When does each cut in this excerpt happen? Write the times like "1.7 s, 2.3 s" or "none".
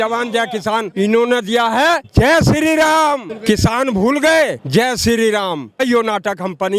0.9 s, 2.1 s, 3.3 s, 4.6 s, 5.8 s